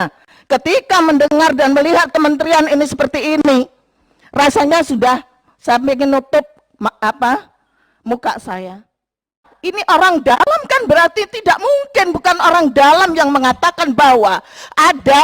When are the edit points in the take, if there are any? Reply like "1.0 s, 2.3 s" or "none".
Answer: 9.5 s